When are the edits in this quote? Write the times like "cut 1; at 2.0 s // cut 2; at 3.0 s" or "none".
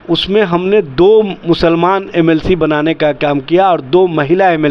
none